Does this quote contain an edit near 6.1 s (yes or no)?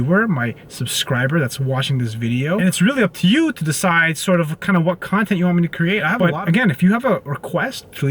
yes